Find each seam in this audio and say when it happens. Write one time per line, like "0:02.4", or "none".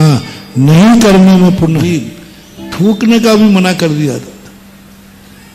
0:01.8